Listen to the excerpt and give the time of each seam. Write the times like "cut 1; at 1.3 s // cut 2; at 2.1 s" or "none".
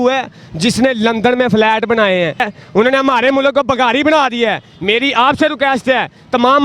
cut 1; at 2.5 s